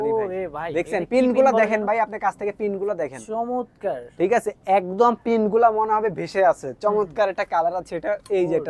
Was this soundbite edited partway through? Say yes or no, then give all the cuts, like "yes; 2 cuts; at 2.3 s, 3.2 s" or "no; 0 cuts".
no; 0 cuts